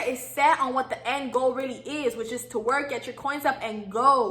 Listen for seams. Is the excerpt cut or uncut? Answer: uncut